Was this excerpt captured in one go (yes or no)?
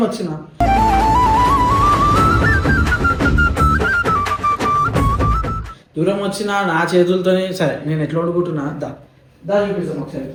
yes